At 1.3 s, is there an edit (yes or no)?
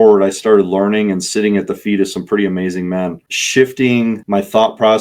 no